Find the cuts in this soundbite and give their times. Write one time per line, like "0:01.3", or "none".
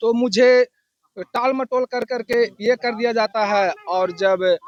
none